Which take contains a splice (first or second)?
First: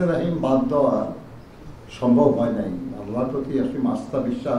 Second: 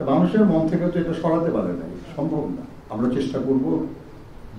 second